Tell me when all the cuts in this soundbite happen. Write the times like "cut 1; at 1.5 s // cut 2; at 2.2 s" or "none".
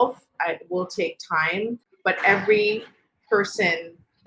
cut 1; at 1.9 s